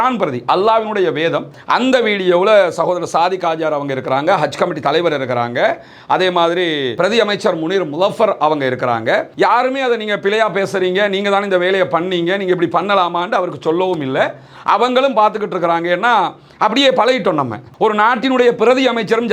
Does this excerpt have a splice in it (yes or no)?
yes